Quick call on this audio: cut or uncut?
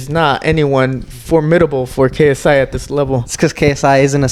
uncut